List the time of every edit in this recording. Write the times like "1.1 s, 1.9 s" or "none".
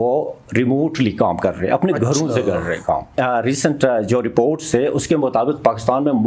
3.1 s